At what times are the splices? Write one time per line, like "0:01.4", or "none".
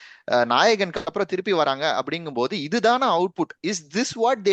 none